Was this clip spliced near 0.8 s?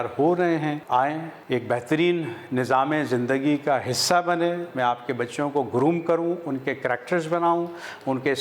no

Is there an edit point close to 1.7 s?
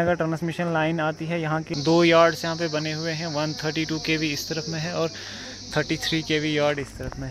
yes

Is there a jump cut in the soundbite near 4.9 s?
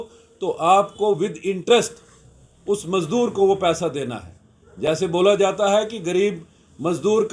no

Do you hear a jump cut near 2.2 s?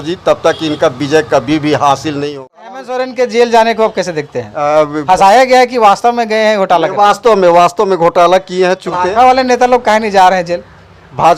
yes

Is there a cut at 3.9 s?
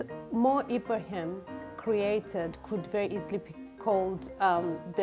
no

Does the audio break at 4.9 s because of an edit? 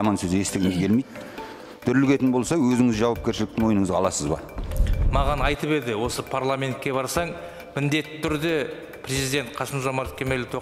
yes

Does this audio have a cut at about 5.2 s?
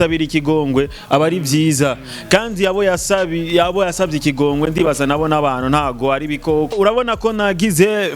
no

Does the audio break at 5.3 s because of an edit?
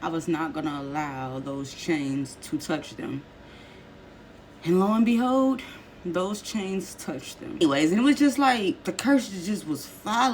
no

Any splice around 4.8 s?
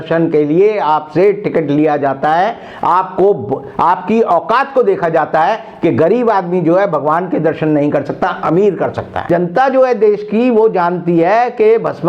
no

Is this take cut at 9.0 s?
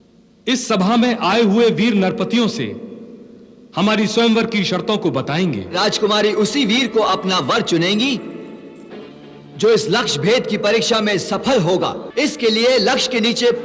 no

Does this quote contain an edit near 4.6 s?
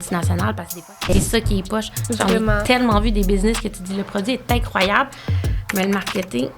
no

